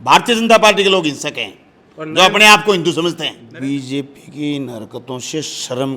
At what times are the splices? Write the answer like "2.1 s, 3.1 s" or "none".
3.4 s